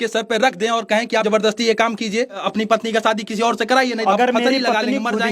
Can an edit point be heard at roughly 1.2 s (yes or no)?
yes